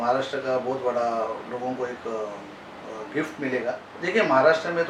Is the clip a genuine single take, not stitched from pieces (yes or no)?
no